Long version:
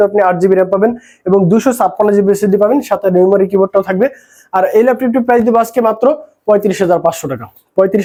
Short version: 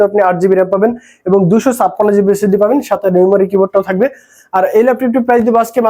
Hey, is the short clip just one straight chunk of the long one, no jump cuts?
yes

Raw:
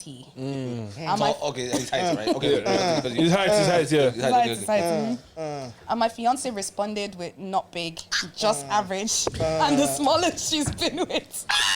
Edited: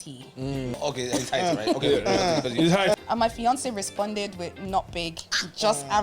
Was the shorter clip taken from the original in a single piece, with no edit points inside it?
no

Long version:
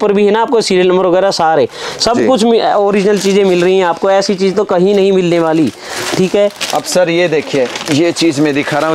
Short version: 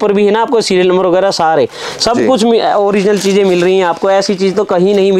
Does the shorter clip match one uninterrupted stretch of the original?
yes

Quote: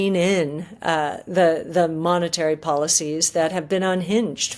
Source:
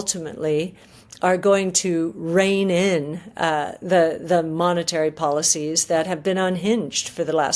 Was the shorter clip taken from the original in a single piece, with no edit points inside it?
yes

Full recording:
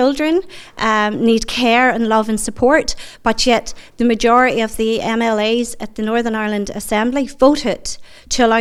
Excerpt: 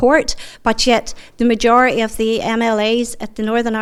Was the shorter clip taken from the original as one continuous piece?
yes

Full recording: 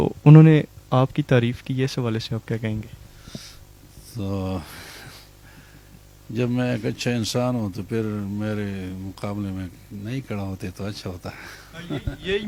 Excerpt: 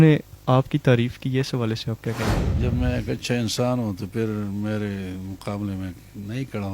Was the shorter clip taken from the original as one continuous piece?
no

